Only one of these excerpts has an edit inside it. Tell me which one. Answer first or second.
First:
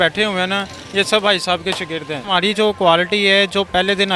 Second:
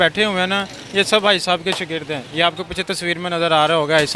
first